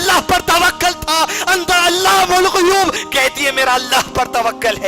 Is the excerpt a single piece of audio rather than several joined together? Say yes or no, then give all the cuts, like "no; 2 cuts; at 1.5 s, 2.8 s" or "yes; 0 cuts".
no; 1 cut; at 3.0 s